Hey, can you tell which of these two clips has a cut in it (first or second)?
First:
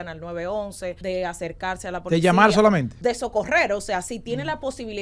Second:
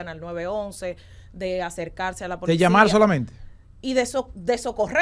first